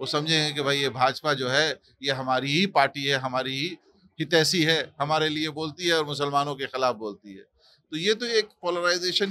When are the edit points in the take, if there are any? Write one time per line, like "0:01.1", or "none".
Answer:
none